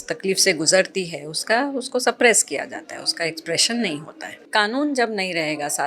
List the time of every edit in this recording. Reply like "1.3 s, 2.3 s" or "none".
4.4 s